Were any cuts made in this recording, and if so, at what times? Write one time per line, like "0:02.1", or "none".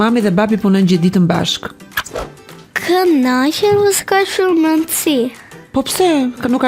none